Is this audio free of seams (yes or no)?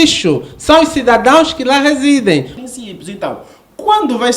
no